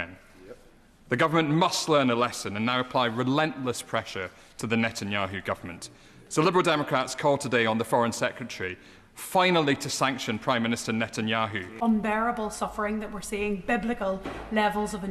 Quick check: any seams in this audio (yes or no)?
yes